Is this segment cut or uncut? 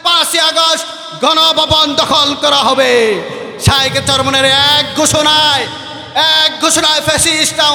uncut